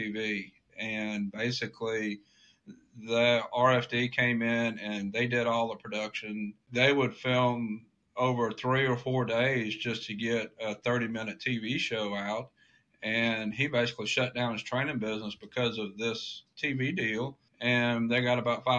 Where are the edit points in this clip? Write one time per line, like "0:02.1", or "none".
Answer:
0:06.6
0:17.4

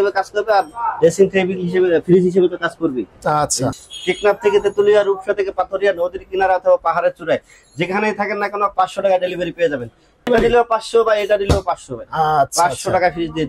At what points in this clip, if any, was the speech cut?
0:03.7
0:10.3

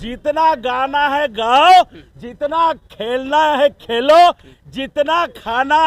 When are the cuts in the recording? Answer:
none

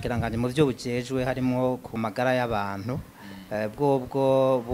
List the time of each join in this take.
0:02.0

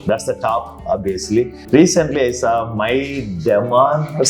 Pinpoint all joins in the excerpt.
0:01.6

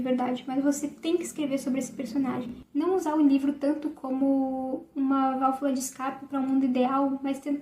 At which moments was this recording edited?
0:02.6

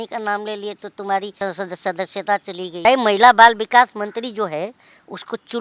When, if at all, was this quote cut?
0:01.3
0:02.8

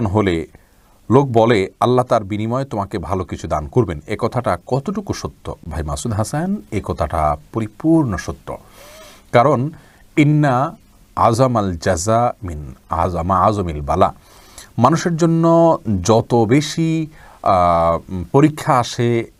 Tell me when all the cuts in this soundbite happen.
none

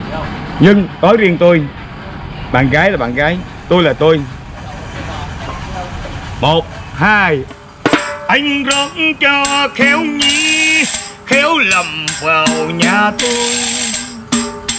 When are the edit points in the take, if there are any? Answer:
0:07.5

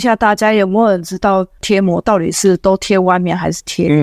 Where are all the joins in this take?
0:01.6

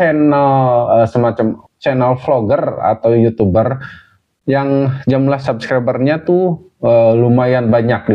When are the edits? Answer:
0:01.6

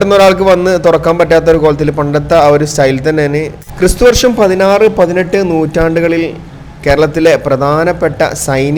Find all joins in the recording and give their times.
0:03.6

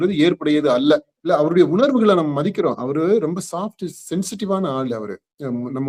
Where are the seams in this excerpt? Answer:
0:01.1

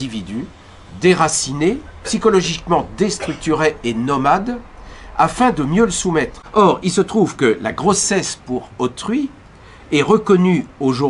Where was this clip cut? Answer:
0:06.4

